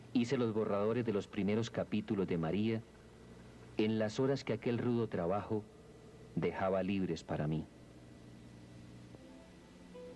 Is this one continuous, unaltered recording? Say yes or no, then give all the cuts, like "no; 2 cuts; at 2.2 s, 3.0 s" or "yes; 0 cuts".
no; 1 cut; at 2.1 s